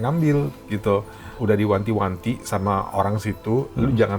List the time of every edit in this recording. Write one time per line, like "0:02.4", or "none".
0:01.3